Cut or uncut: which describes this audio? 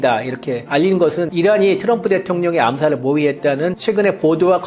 cut